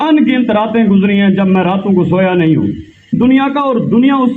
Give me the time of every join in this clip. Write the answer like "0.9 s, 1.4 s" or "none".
3.2 s